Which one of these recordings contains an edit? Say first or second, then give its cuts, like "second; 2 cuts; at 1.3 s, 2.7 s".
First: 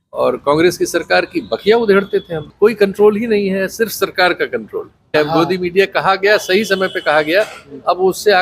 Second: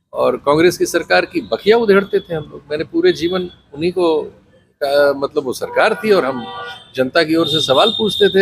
first; 2 cuts; at 2.5 s, 5.1 s